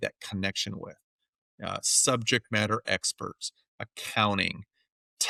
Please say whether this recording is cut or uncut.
uncut